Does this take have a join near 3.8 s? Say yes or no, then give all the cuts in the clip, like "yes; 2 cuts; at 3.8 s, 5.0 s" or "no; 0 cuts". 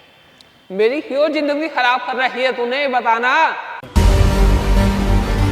yes; 1 cut; at 3.8 s